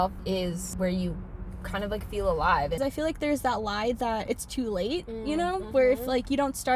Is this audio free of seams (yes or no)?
no